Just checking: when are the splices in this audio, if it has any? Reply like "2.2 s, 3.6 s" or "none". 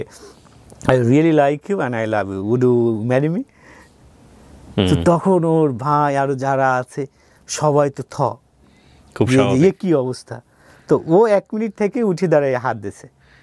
none